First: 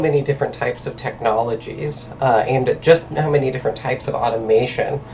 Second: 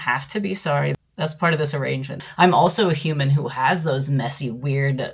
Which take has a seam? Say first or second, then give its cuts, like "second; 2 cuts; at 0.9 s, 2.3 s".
second; 2 cuts; at 0.9 s, 2.2 s